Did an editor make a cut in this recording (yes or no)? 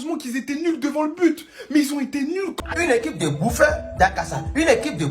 yes